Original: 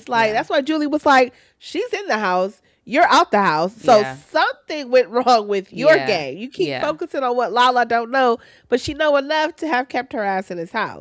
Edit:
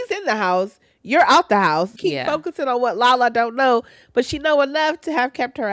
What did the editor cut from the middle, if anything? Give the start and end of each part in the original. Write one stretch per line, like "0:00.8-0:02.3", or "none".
0:03.8-0:06.5